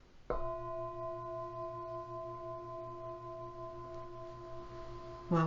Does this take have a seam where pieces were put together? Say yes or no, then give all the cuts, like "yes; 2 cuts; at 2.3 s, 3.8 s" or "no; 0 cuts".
yes; 1 cut; at 1.7 s